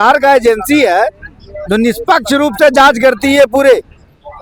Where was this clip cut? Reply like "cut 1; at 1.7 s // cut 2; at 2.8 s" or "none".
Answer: none